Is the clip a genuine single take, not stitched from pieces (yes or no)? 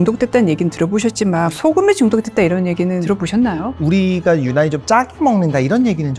no